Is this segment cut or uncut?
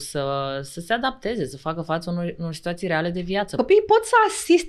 cut